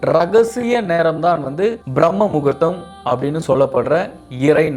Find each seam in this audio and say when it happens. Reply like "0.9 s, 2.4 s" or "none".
1.8 s